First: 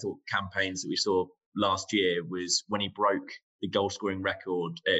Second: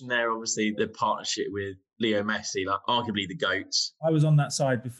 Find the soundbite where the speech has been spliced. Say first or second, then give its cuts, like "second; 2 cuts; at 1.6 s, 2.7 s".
second; 4 cuts; at 0.7 s, 1.8 s, 2.8 s, 4.0 s